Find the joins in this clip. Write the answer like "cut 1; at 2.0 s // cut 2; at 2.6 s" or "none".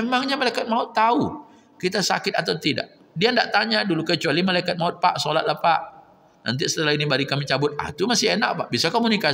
none